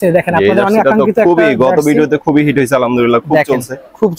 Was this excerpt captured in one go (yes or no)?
yes